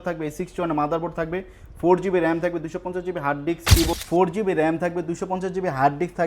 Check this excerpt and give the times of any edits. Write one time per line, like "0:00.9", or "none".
0:03.9